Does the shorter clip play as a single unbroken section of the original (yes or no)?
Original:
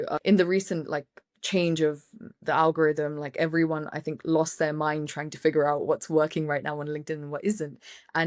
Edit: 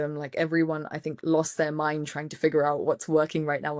yes